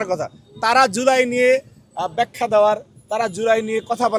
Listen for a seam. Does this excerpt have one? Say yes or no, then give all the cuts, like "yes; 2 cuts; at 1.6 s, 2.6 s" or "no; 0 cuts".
no; 0 cuts